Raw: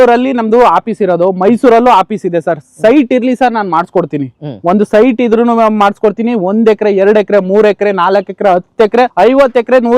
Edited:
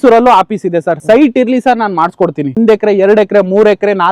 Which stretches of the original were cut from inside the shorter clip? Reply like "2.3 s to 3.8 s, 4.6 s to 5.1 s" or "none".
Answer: 2.5 s to 2.7 s, 4.3 s to 6.5 s